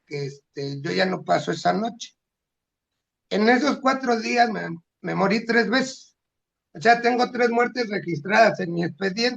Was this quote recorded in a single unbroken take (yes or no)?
yes